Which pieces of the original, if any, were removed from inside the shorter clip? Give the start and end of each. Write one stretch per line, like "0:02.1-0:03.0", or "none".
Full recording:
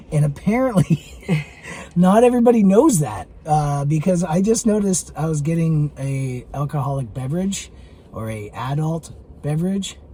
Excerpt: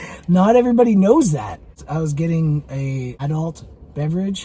0:03.4-0:05.0
0:06.5-0:08.7